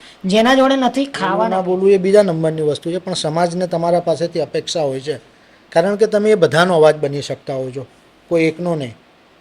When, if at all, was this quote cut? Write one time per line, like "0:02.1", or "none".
0:01.5